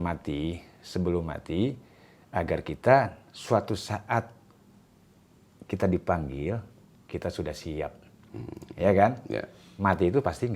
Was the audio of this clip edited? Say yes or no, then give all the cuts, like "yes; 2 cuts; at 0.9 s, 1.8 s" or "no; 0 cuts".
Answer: no; 0 cuts